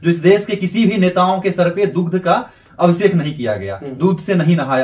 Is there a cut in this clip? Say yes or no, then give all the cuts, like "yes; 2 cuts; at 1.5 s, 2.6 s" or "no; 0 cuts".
no; 0 cuts